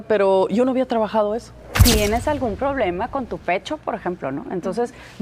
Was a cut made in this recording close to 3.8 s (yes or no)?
no